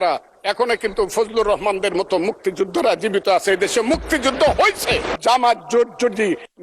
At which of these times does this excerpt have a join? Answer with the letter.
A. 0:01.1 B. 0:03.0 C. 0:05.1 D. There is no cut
C